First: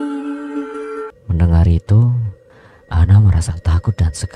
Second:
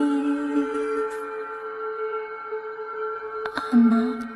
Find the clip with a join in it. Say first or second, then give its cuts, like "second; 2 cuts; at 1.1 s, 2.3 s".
first; 1 cut; at 1.2 s